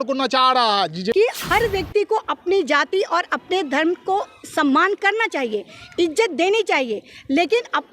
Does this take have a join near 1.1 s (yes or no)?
yes